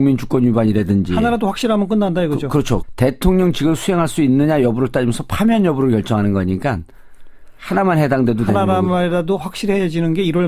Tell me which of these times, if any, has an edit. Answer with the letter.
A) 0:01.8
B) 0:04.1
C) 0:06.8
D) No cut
C